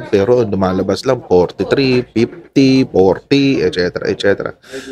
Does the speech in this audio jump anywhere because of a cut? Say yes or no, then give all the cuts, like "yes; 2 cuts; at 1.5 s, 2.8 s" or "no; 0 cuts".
no; 0 cuts